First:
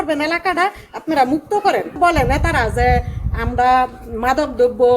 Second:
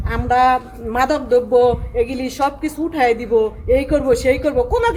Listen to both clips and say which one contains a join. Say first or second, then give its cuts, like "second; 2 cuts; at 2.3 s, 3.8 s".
first; 1 cut; at 2.0 s